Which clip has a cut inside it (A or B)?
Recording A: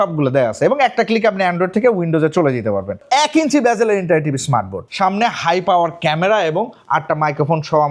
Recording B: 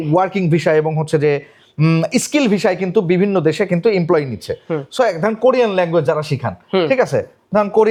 A